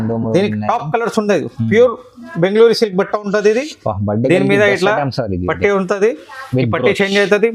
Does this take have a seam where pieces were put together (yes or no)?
no